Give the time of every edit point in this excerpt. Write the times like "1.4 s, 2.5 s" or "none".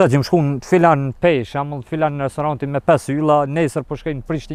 none